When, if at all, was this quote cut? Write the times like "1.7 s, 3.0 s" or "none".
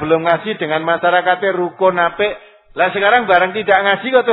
none